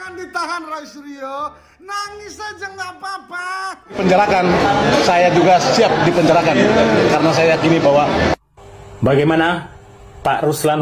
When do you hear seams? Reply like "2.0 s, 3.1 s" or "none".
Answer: 4.0 s